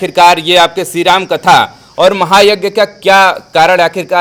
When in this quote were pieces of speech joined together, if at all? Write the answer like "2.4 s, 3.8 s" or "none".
none